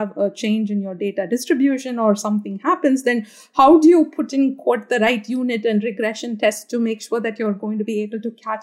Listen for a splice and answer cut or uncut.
uncut